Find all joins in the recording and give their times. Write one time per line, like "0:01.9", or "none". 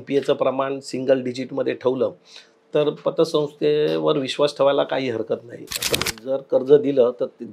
0:06.0